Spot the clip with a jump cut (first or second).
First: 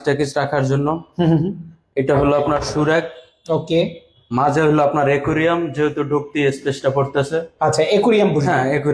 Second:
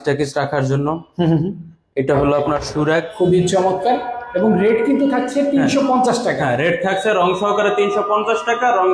second